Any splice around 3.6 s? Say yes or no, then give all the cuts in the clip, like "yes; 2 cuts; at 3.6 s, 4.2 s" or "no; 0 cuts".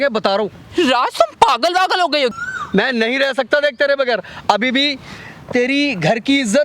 no; 1 cut; at 2.3 s